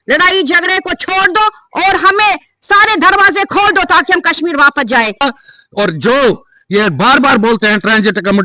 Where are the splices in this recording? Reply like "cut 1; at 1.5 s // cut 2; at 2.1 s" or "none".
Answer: cut 1; at 5.2 s